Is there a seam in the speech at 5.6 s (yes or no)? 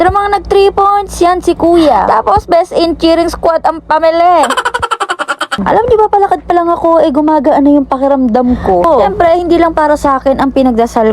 yes